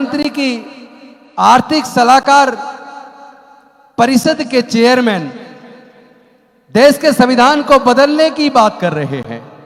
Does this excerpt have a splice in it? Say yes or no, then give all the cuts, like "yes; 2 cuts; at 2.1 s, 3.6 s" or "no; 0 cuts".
no; 0 cuts